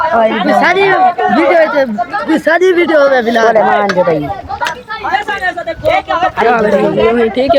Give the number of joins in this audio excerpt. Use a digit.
0